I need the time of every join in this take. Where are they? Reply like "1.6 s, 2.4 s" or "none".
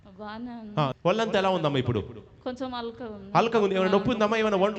0.9 s